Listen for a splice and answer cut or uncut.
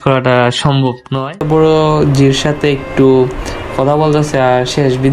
cut